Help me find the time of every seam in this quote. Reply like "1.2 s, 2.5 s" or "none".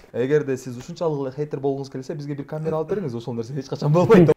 none